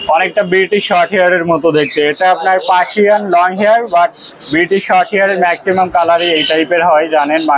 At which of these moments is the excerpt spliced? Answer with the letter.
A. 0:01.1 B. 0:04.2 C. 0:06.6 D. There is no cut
D